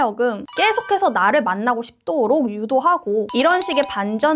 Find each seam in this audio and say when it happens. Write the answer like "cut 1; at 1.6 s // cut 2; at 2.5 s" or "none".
cut 1; at 3.3 s